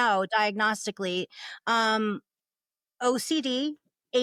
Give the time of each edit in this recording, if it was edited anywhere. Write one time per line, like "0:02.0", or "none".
none